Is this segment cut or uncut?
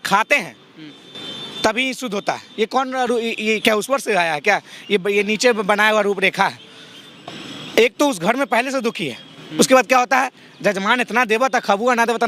uncut